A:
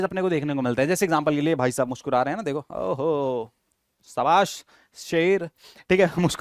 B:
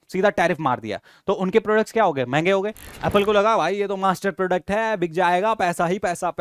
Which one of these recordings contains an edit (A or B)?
B